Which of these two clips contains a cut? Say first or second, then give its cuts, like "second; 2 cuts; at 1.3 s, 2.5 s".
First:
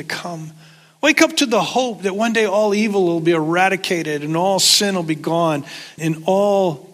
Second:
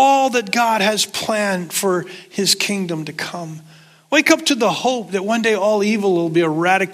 first; 1 cut; at 6.0 s